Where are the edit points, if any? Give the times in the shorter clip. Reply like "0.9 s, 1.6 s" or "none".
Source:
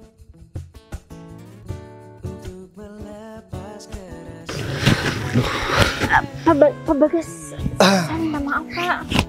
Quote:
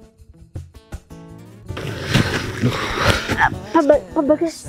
1.8 s